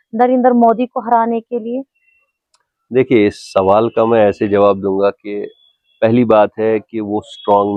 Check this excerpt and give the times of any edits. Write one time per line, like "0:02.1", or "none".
none